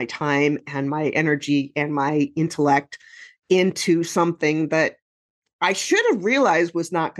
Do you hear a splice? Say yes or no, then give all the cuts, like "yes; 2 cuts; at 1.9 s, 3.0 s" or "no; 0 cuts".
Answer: no; 0 cuts